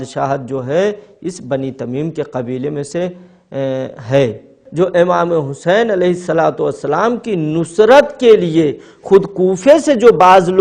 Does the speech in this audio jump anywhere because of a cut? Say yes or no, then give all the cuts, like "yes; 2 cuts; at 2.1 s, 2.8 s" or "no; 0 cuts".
yes; 1 cut; at 4.6 s